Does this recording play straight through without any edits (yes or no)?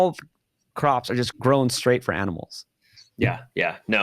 no